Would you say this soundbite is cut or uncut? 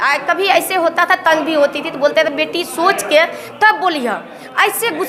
uncut